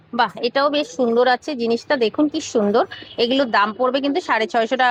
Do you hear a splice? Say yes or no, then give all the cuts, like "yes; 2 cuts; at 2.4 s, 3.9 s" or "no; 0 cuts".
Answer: no; 0 cuts